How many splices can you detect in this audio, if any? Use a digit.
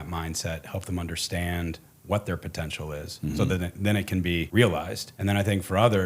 2